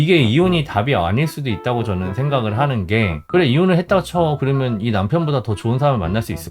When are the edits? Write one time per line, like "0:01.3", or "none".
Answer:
none